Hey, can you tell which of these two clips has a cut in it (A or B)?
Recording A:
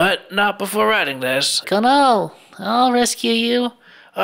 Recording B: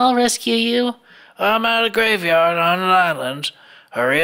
A